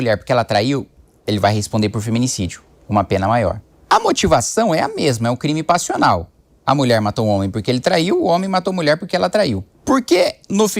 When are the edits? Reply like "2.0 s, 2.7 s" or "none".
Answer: 3.7 s, 9.7 s